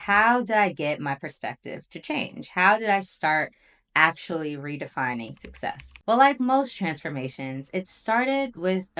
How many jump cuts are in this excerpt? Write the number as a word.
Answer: zero